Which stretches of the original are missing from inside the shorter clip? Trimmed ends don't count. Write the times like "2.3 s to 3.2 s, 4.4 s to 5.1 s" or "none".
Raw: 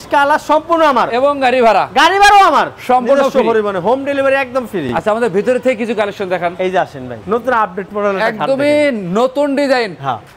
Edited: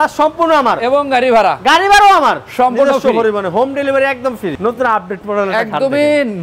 4.9 s to 7.2 s